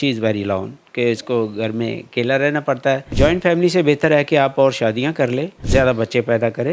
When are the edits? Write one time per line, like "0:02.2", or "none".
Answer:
0:03.1
0:05.6